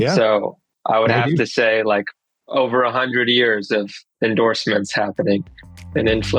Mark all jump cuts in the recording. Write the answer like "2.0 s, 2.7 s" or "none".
none